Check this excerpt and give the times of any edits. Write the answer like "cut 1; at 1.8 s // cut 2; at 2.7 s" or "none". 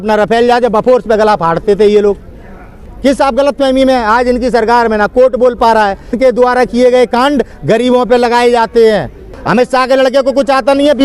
cut 1; at 2.7 s // cut 2; at 6.2 s // cut 3; at 9.4 s